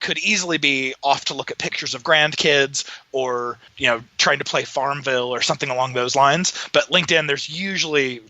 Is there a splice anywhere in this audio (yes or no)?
yes